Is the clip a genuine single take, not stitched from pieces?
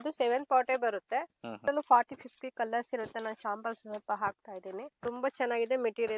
no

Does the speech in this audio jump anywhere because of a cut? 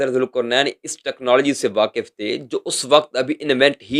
no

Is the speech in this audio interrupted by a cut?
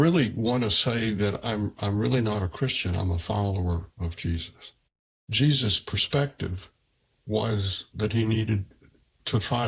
yes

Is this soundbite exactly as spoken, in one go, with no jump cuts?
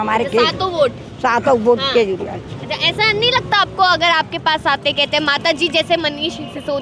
yes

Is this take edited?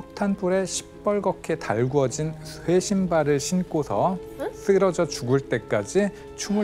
no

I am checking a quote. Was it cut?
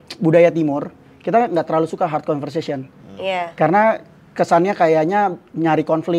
no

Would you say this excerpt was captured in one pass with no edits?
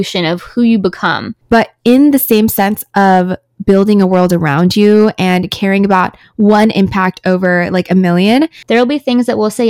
no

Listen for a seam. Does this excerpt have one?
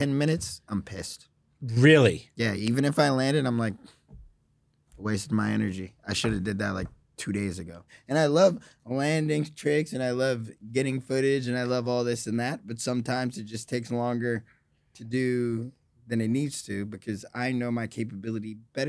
yes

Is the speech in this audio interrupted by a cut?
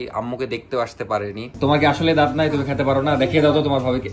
yes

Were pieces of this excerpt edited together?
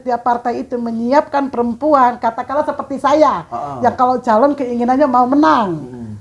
no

